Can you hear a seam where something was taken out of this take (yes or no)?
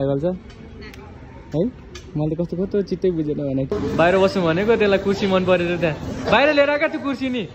yes